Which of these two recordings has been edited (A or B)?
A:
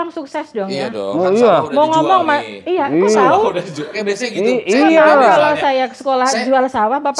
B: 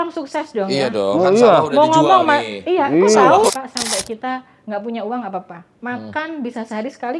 B